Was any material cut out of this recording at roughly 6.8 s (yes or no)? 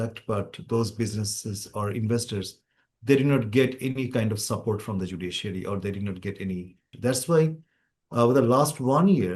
yes